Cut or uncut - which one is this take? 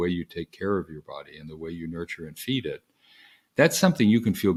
uncut